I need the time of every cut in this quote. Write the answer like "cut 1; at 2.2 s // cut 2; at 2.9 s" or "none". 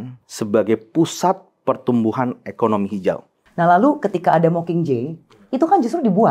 cut 1; at 3.4 s